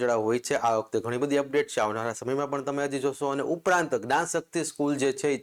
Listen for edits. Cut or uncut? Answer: uncut